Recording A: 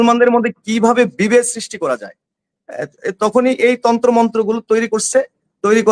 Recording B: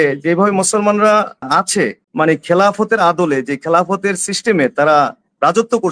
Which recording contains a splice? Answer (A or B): B